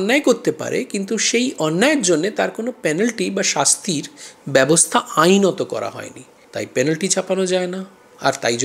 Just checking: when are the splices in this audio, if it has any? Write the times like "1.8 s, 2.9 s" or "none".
none

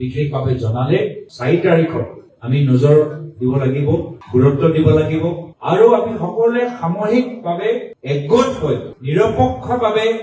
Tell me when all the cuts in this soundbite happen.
1.3 s

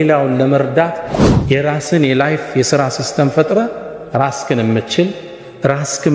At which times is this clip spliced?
1.1 s

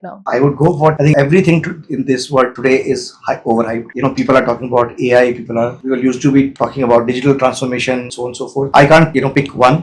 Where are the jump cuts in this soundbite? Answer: none

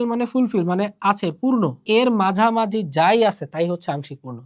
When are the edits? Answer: 1.8 s

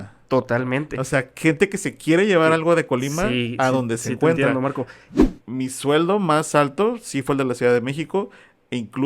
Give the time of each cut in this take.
5.2 s

